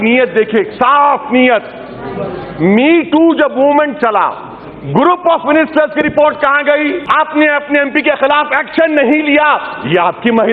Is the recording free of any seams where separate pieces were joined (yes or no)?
no